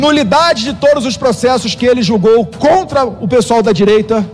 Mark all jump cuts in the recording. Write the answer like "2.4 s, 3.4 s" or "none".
none

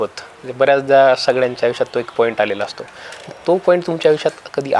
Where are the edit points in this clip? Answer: none

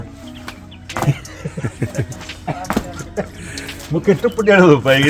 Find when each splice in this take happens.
none

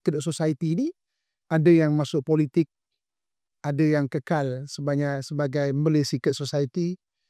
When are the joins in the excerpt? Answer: none

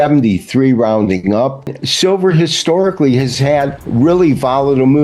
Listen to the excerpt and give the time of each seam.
1.8 s, 3.8 s

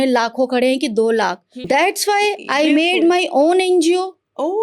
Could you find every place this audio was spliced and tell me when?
1.5 s

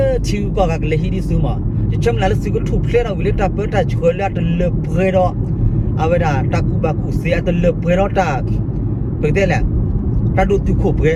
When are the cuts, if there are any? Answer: none

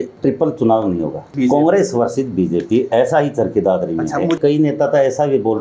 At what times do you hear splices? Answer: 1.3 s, 4.4 s

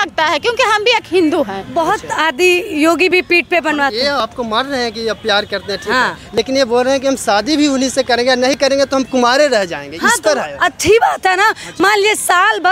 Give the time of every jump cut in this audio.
1.6 s

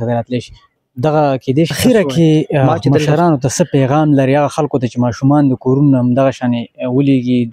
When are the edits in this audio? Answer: 1.8 s

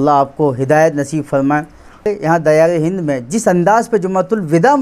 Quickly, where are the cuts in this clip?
2.1 s

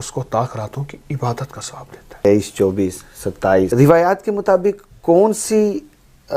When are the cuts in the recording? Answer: 2.2 s, 3.7 s

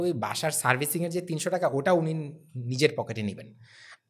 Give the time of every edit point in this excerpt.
none

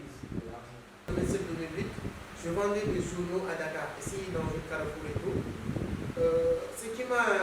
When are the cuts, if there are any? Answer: 1.1 s

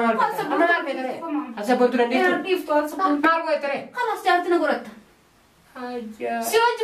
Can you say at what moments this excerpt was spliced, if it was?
3.2 s

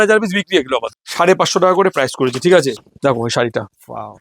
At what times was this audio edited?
1.0 s, 2.8 s

